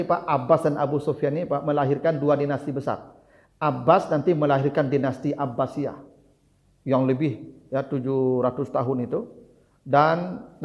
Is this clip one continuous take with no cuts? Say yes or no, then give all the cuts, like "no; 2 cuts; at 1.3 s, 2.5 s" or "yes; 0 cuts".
yes; 0 cuts